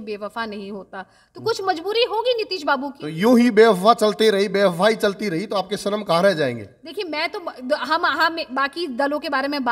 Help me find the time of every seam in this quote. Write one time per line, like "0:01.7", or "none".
none